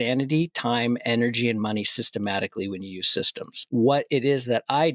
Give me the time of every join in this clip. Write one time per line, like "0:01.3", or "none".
0:03.6